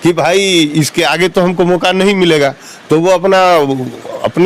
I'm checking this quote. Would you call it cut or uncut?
uncut